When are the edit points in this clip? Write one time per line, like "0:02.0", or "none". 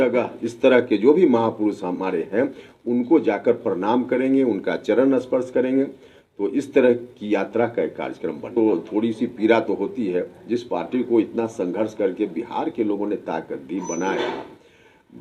0:08.5